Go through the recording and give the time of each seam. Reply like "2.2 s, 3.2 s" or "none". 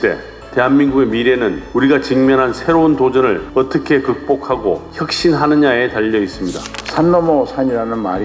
6.7 s